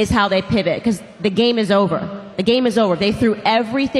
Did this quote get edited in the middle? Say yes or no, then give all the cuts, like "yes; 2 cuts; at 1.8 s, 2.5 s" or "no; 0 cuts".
no; 0 cuts